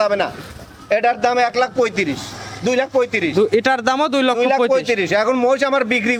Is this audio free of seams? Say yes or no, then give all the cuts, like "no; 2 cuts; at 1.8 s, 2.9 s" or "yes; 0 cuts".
yes; 0 cuts